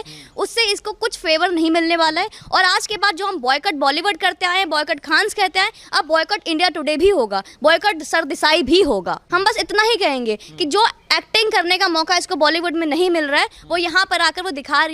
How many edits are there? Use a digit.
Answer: 1